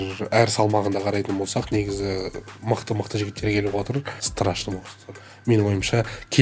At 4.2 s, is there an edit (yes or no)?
yes